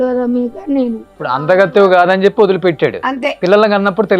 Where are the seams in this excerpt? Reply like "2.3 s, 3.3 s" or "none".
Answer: 1.3 s, 3.3 s